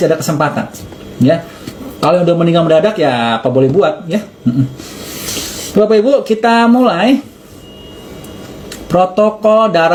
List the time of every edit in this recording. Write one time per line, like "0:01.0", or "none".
none